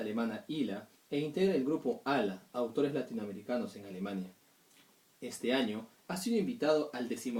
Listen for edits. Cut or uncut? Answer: uncut